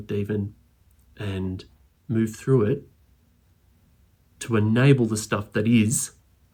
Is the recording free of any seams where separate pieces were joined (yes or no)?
yes